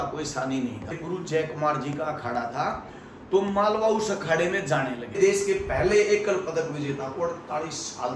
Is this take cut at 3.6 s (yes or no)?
no